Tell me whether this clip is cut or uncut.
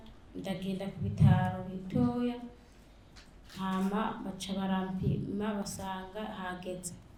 uncut